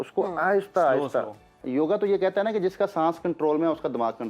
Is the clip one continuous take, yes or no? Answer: no